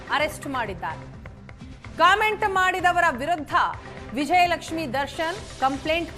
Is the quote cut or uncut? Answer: uncut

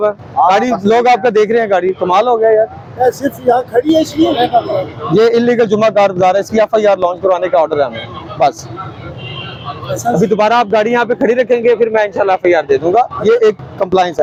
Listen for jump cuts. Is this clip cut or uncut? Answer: uncut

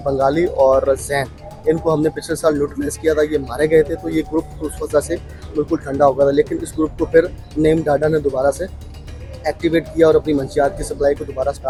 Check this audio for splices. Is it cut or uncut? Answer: uncut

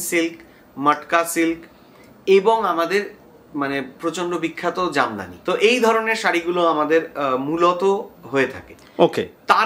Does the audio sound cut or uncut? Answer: uncut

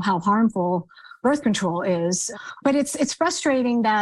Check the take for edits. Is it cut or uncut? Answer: cut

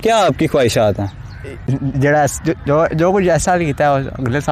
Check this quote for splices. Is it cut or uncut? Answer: cut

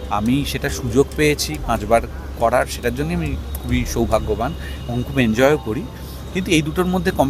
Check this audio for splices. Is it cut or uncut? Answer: uncut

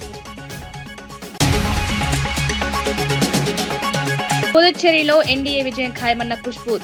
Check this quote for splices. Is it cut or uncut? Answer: uncut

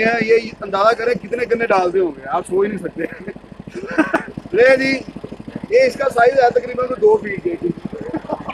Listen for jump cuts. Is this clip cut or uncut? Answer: cut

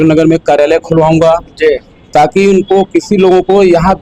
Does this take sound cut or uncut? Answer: uncut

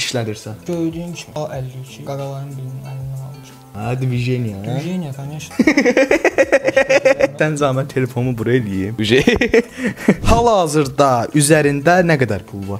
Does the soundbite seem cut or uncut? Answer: cut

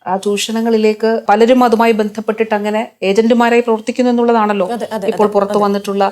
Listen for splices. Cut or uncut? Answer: cut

